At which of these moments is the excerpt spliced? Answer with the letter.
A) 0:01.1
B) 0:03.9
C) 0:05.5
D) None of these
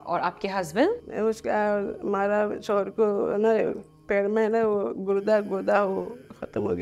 A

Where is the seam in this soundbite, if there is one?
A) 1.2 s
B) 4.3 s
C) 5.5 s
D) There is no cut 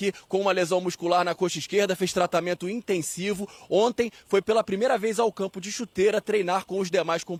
D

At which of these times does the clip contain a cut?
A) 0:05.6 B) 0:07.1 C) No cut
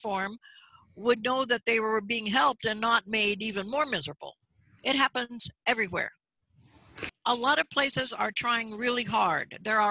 B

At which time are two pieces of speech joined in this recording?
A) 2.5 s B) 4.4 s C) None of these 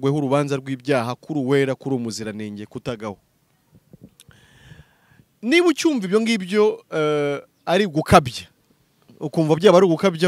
C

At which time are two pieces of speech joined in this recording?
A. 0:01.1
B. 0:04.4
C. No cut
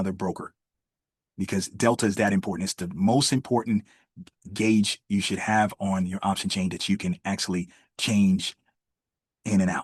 C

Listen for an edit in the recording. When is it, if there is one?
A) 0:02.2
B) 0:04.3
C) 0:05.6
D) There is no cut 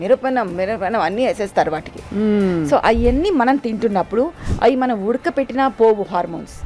D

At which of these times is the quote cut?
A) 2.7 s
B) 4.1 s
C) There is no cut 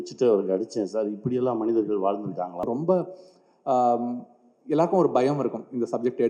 A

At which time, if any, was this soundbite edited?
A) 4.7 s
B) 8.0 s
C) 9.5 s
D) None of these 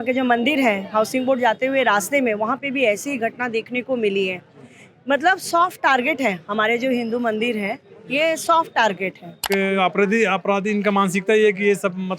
C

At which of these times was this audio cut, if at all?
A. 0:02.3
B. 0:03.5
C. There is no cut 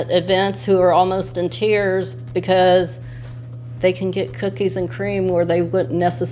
C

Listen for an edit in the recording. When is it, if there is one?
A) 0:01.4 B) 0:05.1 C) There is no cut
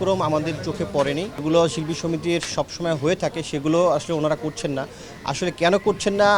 A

